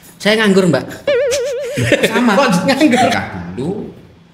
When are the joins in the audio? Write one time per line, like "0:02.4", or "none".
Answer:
0:03.1